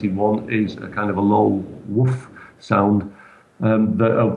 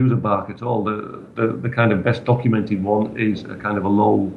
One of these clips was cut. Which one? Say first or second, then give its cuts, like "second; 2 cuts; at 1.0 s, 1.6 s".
first; 1 cut; at 3.4 s